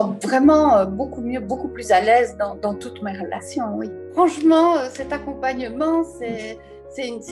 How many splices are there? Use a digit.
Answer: 0